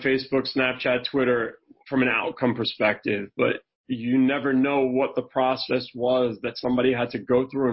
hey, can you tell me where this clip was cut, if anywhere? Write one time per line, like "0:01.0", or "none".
none